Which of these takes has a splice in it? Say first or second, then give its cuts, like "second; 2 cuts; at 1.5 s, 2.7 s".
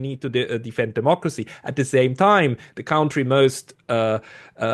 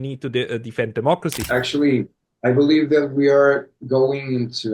second; 1 cut; at 1.4 s